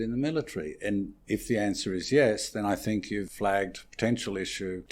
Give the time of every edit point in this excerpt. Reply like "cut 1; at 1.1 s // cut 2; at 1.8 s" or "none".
cut 1; at 3.3 s